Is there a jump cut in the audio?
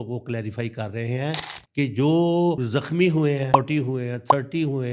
no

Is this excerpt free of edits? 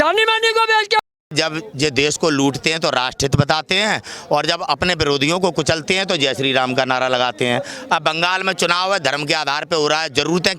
no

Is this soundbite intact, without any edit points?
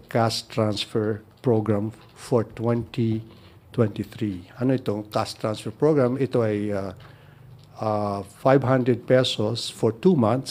yes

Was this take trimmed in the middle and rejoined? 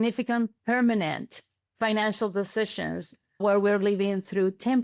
no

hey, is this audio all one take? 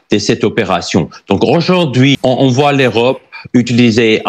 no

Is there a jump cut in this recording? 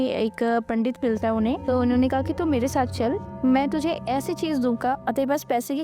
yes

